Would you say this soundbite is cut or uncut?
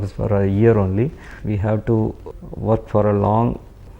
cut